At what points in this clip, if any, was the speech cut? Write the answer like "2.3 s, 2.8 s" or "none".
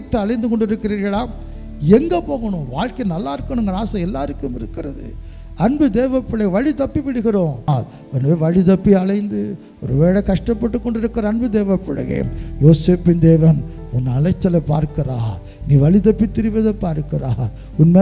7.7 s